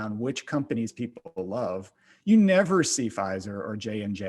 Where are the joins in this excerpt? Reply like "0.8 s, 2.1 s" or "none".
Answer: none